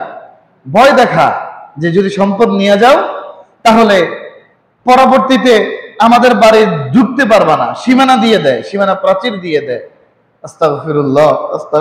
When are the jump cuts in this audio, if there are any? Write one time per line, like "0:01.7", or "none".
none